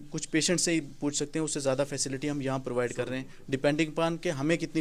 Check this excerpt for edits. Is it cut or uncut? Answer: uncut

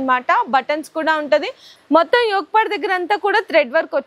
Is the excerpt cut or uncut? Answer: cut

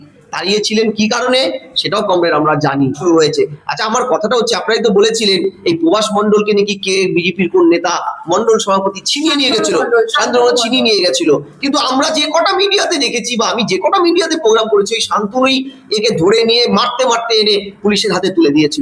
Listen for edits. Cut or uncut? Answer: cut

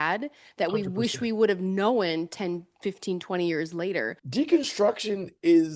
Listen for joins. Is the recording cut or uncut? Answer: cut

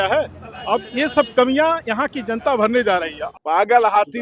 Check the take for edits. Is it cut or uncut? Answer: cut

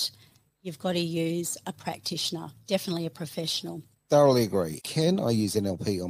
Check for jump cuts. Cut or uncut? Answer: cut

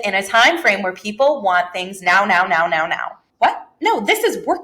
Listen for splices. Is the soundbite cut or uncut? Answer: cut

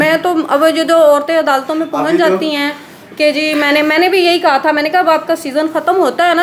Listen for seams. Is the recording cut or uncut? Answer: uncut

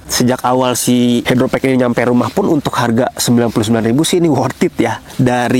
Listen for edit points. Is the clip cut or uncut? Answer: uncut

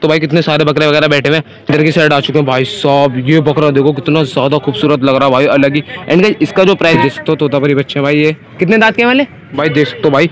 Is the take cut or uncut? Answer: cut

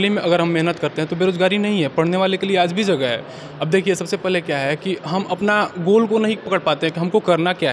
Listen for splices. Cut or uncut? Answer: uncut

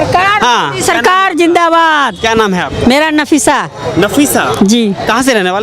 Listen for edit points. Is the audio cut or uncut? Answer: uncut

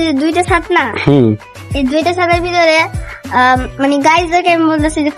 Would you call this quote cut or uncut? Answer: uncut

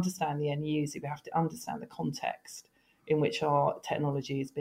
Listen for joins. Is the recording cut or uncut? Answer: uncut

